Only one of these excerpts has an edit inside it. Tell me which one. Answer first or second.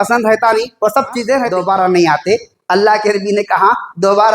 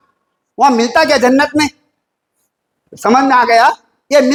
first